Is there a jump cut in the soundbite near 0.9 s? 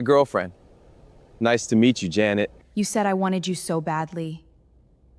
no; 1 cut; at 2.6 s

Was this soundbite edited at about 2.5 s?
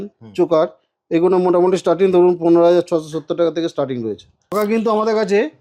no; 1 cut; at 4.5 s

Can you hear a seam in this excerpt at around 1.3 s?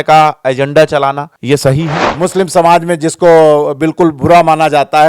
yes; 2 cuts; at 1.3 s, 2.0 s

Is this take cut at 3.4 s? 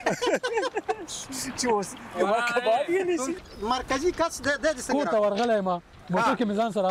yes; 1 cut; at 3.4 s

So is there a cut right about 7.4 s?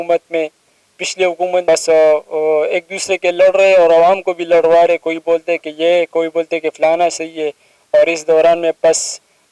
no; 1 cut; at 1.6 s

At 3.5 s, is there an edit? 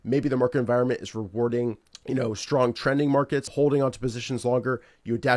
yes; 2 cuts; at 1.9 s, 3.5 s

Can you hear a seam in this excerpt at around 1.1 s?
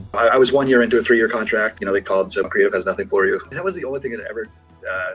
no; 2 cuts; at 2.4 s, 3.5 s

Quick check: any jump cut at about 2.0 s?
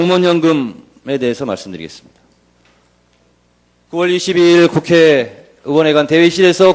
no; 0 cuts

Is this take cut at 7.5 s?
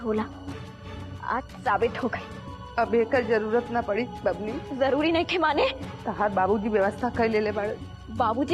no; 2 cuts; at 4.6 s, 5.9 s

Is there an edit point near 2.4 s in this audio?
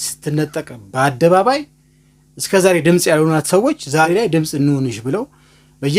no; 1 cut; at 4.0 s

